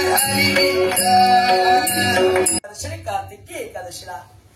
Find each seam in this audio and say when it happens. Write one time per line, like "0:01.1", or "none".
0:02.6

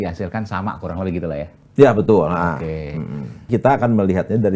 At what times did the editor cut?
0:03.5

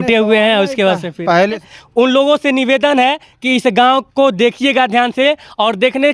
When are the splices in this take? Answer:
0:01.6

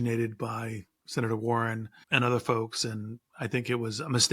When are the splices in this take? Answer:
0:01.9

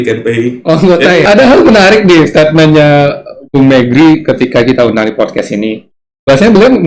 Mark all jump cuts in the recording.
0:01.2

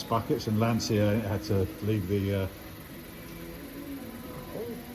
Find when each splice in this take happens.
none

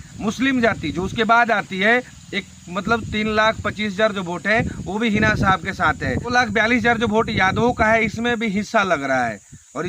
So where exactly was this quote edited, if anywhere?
0:06.3

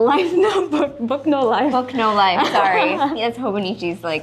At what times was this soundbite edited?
0:03.2

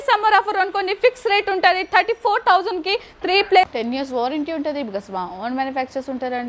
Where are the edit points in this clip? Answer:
0:03.7

